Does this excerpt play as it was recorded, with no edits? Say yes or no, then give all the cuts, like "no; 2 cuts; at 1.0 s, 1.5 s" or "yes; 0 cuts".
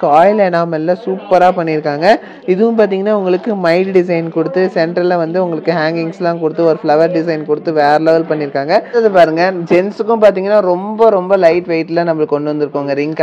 no; 1 cut; at 8.9 s